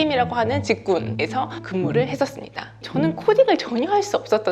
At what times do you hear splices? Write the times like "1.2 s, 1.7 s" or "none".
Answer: 1.6 s, 2.8 s